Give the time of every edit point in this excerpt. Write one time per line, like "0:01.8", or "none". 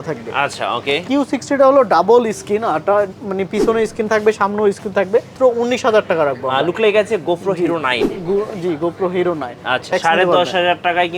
0:01.0
0:05.3
0:09.9